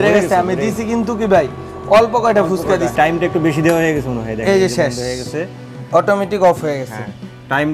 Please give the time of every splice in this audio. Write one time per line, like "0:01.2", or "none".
none